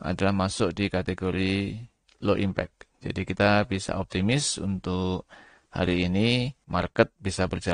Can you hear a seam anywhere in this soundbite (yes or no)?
no